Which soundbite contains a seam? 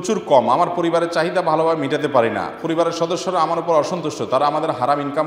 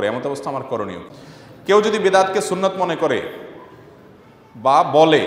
second; 1 cut; at 1.1 s

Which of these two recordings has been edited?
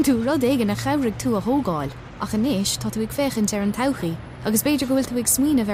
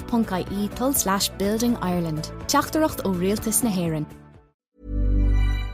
second; 1 cut; at 4.6 s

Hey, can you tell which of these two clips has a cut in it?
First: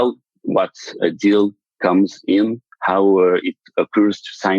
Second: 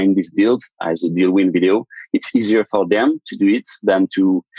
first; 1 cut; at 1.0 s

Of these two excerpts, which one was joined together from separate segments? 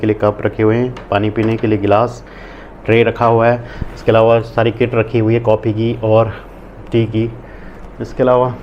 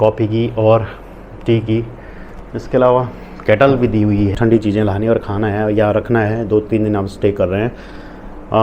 second; 1 cut; at 4.3 s

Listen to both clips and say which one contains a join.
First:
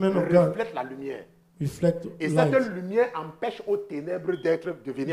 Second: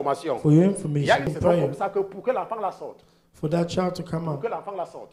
second; 1 cut; at 1.3 s

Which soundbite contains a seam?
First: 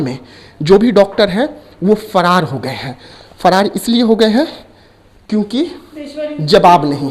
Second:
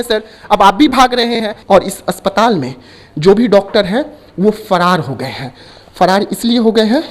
second; 1 cut; at 1.5 s

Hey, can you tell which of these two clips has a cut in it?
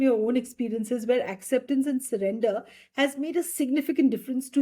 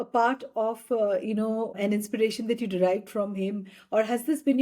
second; 1 cut; at 1.7 s

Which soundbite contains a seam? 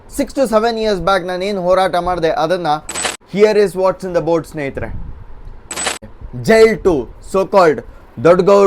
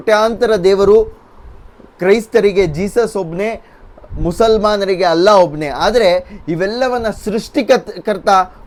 first; 2 cuts; at 3.0 s, 5.9 s

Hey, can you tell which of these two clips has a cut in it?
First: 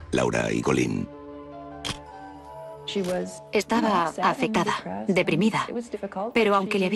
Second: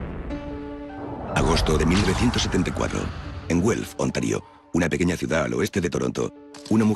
first; 1 cut; at 1.2 s

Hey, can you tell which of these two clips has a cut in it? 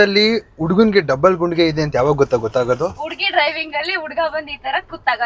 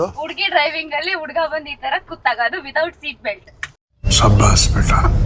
second; 1 cut; at 3.7 s

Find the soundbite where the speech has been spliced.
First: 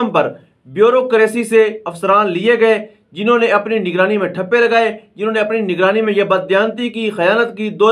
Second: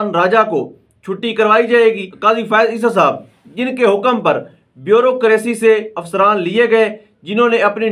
second; 1 cut; at 2.1 s

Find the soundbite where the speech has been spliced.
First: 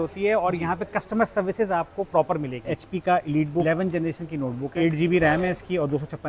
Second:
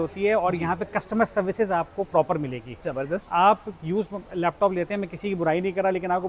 first; 3 cuts; at 2.6 s, 3.6 s, 4.7 s

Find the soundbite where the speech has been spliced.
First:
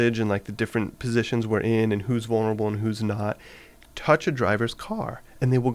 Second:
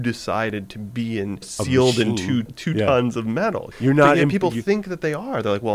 second; 3 cuts; at 1.5 s, 2.5 s, 3.7 s

